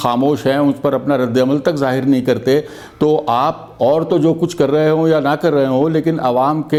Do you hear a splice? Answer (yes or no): no